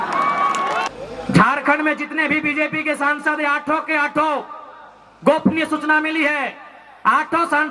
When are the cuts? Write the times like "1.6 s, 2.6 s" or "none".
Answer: 0.9 s